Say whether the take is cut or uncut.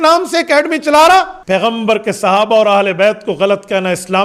cut